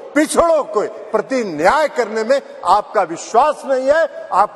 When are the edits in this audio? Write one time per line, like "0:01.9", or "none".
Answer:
none